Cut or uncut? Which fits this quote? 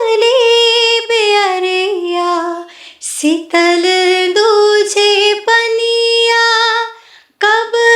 uncut